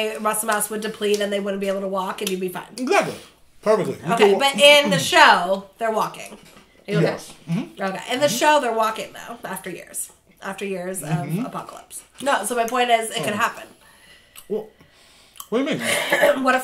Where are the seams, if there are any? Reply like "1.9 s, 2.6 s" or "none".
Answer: 12.1 s